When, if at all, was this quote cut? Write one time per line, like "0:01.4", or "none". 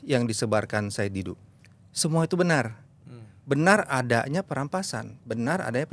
none